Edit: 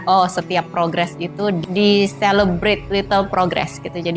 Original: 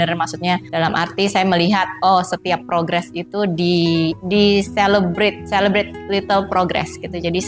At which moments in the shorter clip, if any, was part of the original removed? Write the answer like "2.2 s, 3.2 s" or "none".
1.6 s, 2.8 s

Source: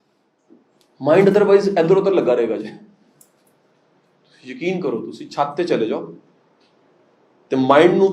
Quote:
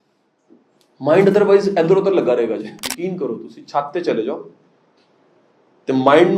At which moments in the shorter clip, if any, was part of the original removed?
2.8 s

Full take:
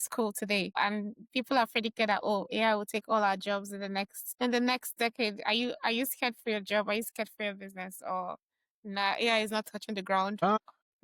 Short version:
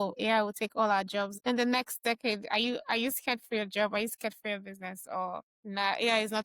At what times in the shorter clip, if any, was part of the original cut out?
1.3 s, 5.5 s

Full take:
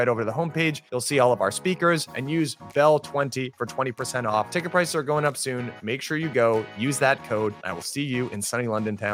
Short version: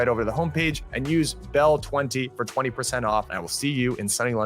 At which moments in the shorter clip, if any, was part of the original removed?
0.9 s, 3.3 s

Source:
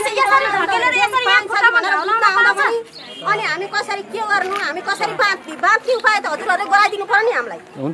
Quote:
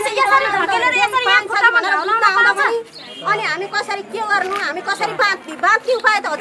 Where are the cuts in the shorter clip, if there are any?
none

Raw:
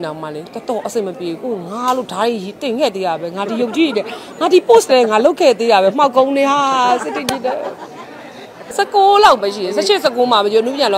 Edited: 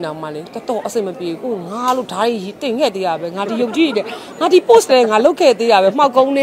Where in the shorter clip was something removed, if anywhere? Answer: none

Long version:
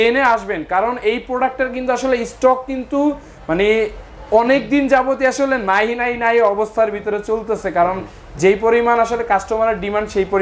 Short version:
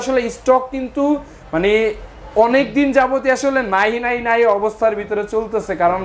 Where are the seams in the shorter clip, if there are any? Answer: none

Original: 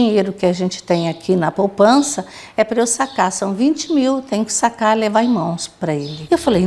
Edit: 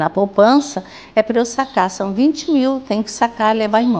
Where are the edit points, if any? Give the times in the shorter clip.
none

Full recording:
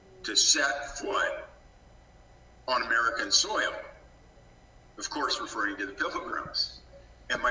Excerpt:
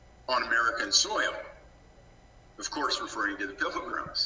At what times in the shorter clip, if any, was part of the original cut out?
none

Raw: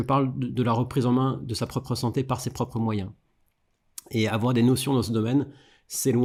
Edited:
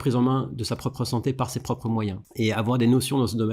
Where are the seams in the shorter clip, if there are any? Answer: 2.2 s

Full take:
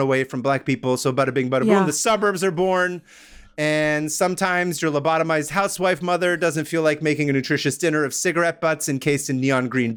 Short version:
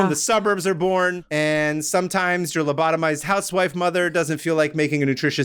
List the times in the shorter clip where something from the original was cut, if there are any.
1.2 s

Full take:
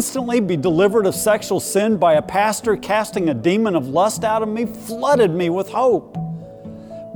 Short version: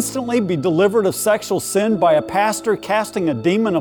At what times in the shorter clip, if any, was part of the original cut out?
none

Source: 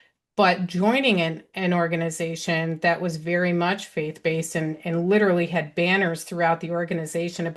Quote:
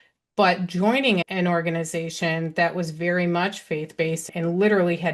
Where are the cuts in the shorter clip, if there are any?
1.2 s, 4.2 s

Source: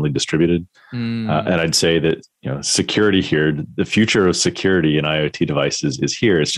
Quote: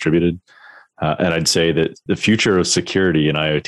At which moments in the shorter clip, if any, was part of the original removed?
2.0 s

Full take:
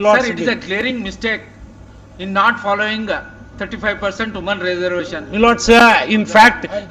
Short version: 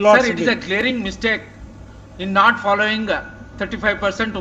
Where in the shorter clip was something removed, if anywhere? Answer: none

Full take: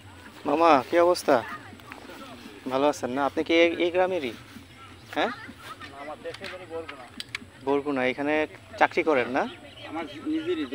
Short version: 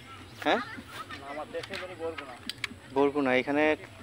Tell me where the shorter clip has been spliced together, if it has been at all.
none

